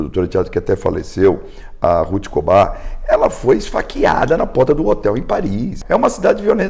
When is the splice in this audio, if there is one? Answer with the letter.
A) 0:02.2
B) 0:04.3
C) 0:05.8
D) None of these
C